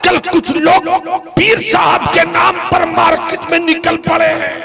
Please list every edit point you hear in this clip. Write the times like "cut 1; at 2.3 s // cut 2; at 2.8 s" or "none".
cut 1; at 1.3 s